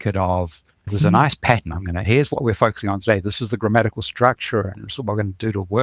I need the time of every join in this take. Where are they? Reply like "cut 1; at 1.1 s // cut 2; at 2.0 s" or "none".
none